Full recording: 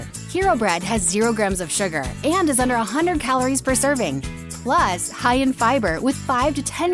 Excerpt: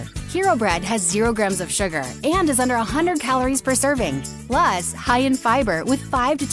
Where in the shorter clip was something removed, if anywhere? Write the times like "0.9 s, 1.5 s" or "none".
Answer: 4.3 s